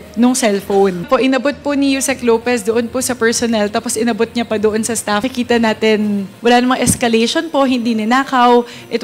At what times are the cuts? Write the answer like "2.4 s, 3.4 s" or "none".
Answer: 1.1 s, 5.3 s